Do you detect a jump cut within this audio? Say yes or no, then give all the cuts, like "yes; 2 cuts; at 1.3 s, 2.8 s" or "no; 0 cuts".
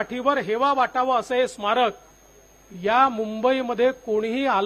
no; 0 cuts